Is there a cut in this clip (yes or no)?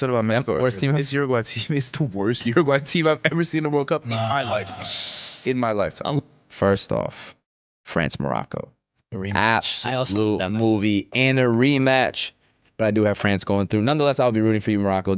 yes